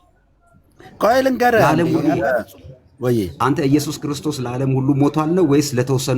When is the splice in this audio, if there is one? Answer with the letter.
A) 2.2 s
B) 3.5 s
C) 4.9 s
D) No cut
A